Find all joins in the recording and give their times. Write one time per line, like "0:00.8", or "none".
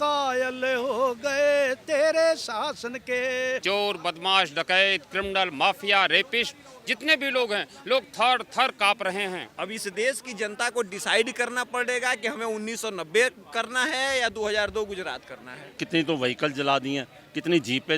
0:03.6
0:09.5
0:15.8